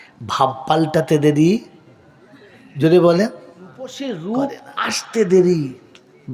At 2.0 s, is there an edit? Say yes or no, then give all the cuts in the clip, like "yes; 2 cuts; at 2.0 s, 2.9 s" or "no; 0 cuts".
no; 1 cut; at 3.9 s